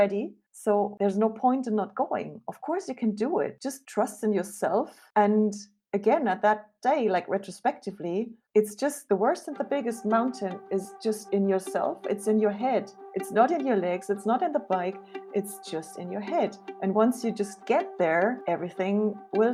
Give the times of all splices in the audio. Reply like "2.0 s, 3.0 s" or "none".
none